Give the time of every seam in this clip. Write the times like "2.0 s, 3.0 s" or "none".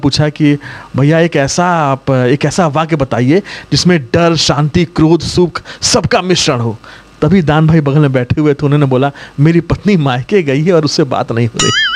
none